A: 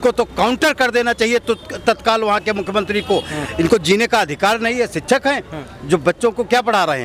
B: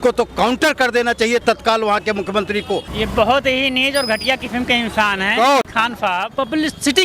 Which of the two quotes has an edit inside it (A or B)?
B